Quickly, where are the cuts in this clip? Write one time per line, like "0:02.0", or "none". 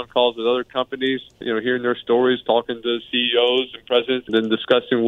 0:01.4
0:04.3